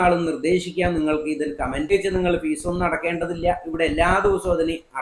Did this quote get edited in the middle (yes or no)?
yes